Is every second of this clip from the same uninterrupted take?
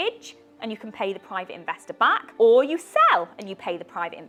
yes; 0 cuts

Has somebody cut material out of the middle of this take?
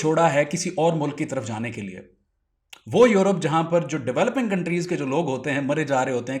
no; 0 cuts

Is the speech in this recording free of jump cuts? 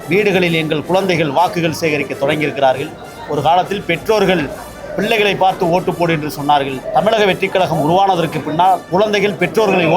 no; 2 cuts; at 6.8 s, 8.8 s

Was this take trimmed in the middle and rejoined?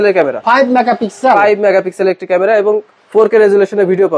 no; 0 cuts

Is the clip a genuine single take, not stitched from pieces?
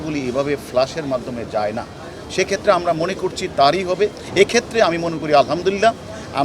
no; 1 cut; at 4.2 s

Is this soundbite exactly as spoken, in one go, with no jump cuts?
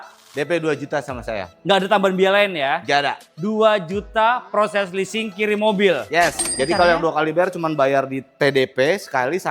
no; 1 cut; at 6.4 s

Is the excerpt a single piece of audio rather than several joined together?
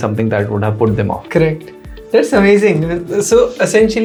yes; 0 cuts

